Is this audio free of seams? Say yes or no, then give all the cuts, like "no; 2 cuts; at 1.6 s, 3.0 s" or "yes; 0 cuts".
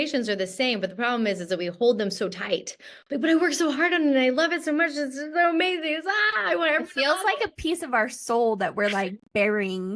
yes; 0 cuts